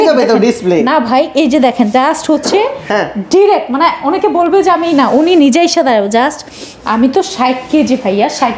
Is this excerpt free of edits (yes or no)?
yes